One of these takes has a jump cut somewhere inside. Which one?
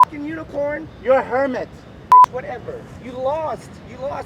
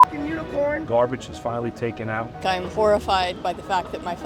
second; 2 cuts; at 0.8 s, 2.4 s

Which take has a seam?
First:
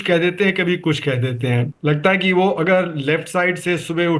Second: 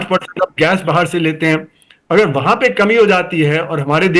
first; 1 cut; at 1.7 s

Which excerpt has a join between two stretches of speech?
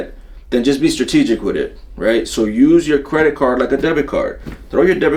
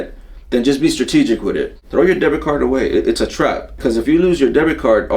second; 2 cuts; at 1.8 s, 3.8 s

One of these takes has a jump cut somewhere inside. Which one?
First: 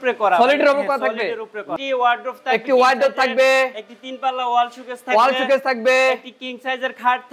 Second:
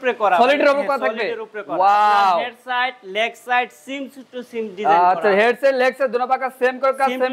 first; 1 cut; at 1.7 s

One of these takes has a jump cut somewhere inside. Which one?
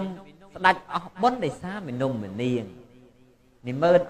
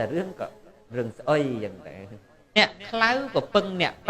second; 1 cut; at 2.6 s

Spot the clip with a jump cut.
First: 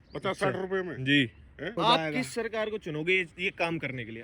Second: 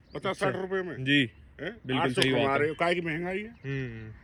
first; 1 cut; at 1.8 s

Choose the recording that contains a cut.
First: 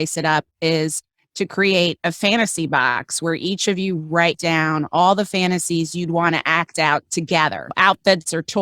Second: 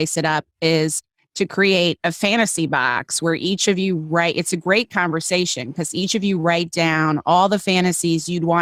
first; 2 cuts; at 4.4 s, 7.7 s

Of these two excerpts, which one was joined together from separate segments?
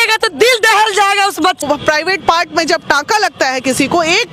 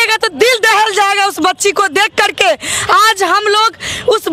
first; 1 cut; at 1.6 s

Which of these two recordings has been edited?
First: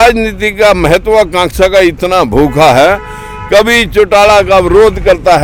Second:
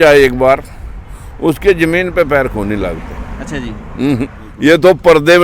second; 1 cut; at 4.4 s

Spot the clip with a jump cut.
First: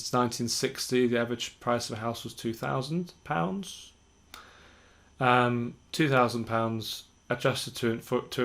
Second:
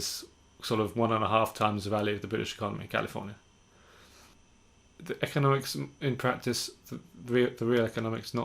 second; 1 cut; at 4.3 s

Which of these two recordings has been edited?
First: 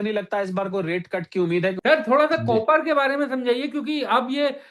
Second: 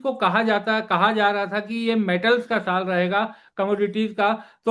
first; 1 cut; at 1.8 s

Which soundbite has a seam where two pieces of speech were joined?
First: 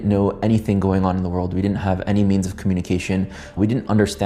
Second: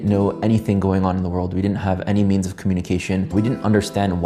second; 1 cut; at 3.3 s

